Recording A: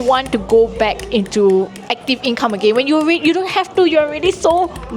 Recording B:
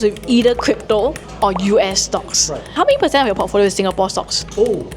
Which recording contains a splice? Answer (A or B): B